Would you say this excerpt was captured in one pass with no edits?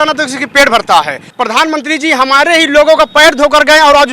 no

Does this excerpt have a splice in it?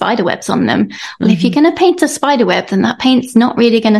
no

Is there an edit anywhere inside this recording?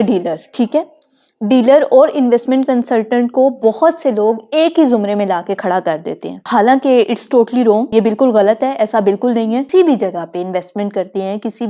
yes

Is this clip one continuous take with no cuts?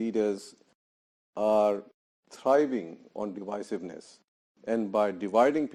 yes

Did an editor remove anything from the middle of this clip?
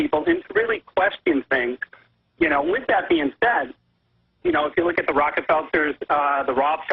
no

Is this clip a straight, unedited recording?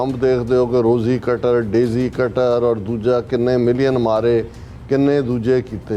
yes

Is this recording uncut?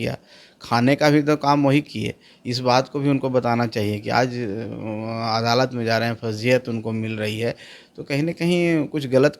yes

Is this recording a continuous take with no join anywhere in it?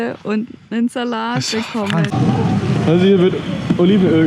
no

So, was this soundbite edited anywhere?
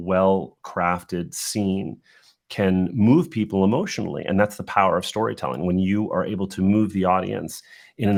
no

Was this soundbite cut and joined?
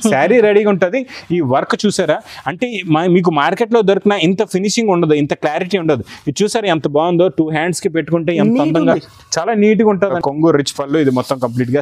yes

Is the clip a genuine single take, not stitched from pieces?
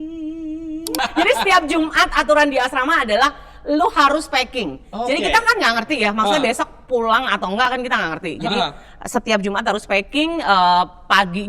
no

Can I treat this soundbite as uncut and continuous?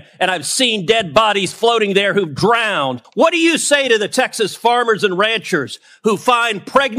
no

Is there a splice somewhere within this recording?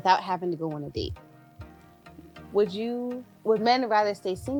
no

